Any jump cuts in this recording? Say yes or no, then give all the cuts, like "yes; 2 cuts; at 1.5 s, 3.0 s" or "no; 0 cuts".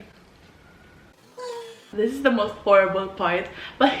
yes; 1 cut; at 1.4 s